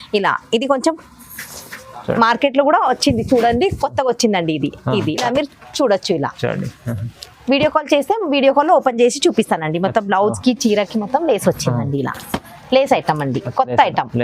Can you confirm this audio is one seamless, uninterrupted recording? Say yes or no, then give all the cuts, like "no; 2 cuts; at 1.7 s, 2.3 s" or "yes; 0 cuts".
no; 1 cut; at 5.2 s